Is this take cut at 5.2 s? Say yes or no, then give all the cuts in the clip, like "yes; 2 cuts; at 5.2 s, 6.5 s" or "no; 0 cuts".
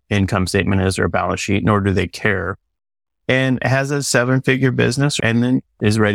yes; 1 cut; at 5.2 s